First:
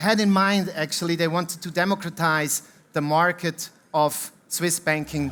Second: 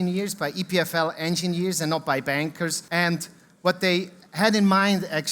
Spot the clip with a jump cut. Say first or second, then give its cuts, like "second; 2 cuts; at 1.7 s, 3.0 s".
second; 1 cut; at 2.8 s